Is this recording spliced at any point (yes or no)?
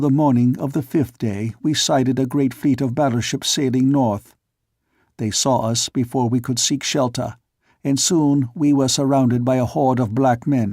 yes